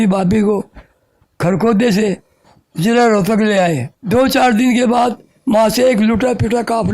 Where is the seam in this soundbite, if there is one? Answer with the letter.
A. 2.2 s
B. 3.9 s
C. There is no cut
B